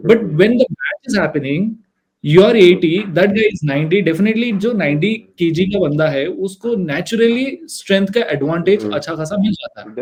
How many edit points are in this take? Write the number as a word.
zero